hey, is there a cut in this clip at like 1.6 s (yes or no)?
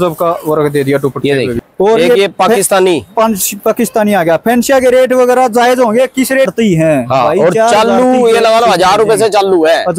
yes